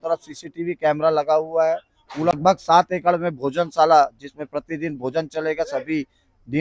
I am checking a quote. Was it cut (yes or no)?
yes